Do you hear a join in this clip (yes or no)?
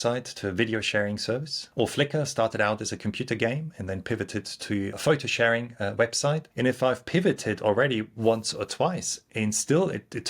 yes